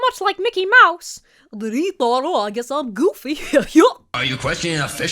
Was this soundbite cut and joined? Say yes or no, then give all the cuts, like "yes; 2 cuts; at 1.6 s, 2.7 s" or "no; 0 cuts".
yes; 1 cut; at 4.1 s